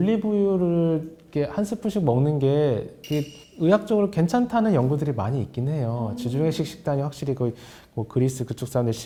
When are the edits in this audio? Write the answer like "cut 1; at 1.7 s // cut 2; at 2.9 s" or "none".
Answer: none

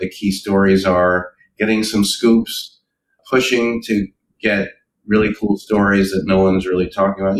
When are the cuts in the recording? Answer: cut 1; at 4.2 s

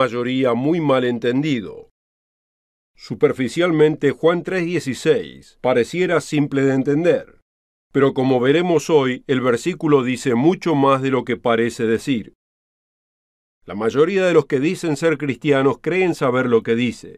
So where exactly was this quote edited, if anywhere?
cut 1; at 7.7 s

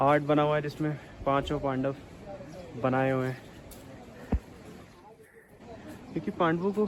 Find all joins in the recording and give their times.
none

